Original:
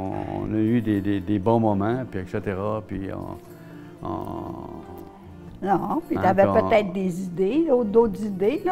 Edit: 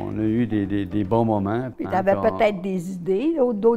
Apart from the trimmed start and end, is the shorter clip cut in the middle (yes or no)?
yes